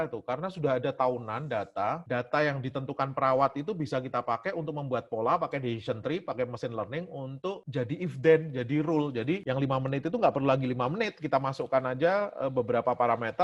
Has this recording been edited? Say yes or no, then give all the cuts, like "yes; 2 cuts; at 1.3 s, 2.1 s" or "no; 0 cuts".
no; 0 cuts